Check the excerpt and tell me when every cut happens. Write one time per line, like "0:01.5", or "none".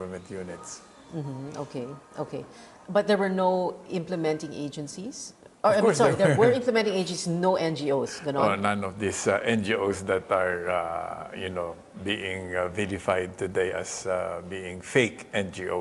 none